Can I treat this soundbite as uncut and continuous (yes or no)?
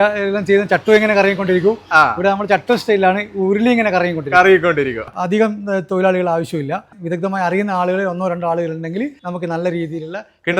no